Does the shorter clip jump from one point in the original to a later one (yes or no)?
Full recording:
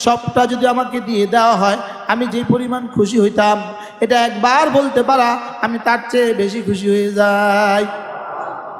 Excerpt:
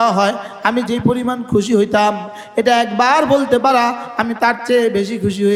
no